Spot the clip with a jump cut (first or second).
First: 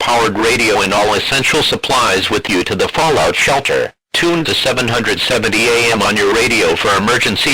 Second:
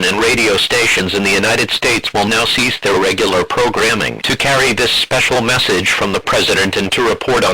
second